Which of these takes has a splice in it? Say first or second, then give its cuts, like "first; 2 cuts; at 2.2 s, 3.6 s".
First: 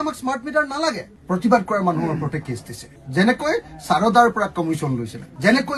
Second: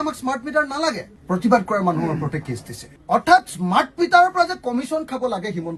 first; 1 cut; at 2.9 s